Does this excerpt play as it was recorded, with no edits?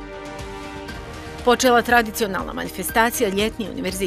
yes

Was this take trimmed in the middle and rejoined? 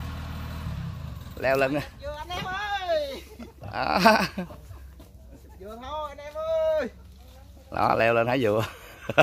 no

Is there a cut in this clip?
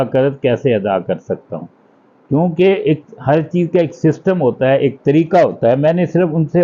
no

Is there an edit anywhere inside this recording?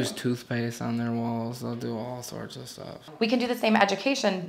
yes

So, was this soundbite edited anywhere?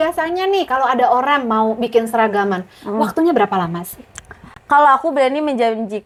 no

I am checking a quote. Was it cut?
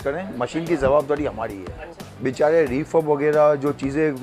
yes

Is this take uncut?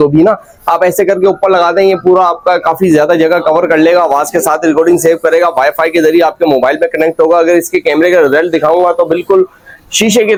yes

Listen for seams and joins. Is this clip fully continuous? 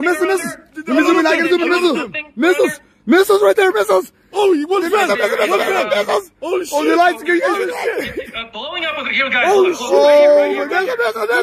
yes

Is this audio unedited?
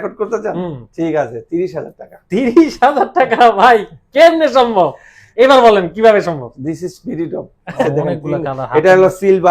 no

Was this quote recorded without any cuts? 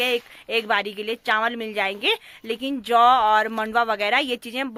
yes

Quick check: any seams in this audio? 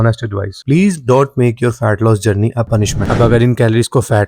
yes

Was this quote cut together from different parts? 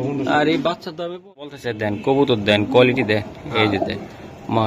yes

